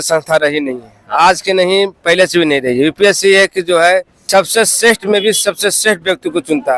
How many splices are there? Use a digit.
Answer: 1